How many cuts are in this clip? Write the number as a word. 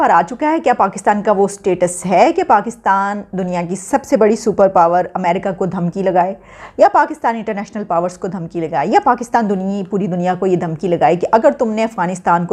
zero